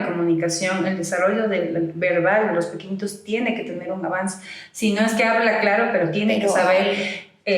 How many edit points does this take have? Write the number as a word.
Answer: zero